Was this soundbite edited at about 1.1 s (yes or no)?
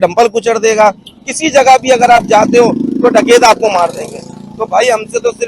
yes